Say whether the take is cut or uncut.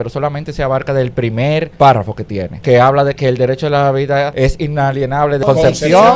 cut